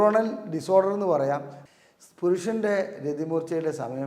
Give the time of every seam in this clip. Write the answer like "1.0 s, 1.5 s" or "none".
1.5 s